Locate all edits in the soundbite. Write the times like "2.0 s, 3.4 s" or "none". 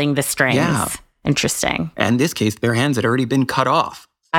1.4 s